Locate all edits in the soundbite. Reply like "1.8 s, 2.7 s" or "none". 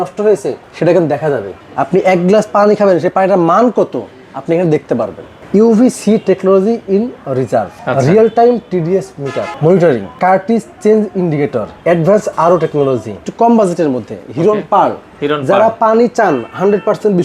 1.6 s, 5.3 s, 7.8 s, 9.5 s, 10.1 s, 11.7 s, 13.2 s